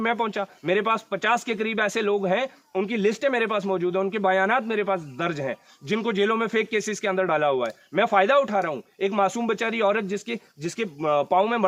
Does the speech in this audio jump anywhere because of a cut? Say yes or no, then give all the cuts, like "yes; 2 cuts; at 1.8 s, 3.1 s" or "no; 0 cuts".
no; 0 cuts